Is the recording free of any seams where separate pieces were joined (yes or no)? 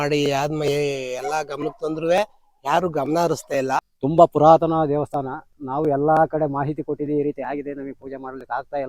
no